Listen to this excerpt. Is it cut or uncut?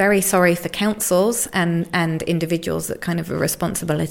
uncut